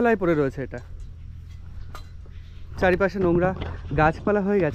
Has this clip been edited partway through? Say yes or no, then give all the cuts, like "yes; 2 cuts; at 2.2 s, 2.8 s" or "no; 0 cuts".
no; 0 cuts